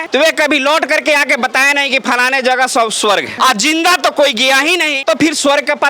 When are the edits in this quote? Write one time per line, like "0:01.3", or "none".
0:03.3